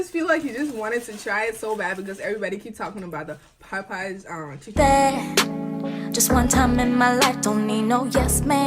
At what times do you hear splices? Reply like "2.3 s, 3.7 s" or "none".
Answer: 4.8 s